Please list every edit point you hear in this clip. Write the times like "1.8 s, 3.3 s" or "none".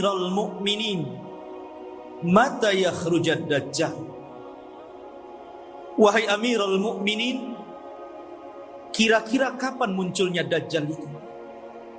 none